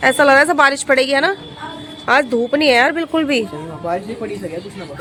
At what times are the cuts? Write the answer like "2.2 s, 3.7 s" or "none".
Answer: none